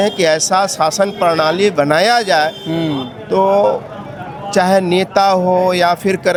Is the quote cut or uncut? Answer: uncut